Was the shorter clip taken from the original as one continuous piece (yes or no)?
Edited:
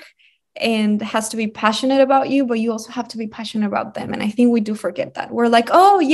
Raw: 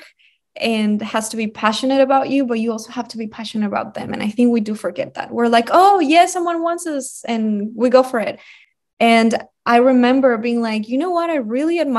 yes